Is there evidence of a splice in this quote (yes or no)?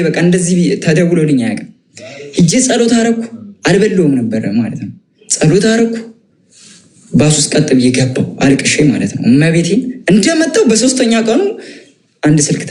no